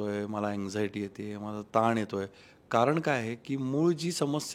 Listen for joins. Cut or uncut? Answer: uncut